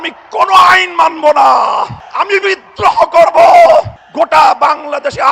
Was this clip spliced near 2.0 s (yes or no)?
yes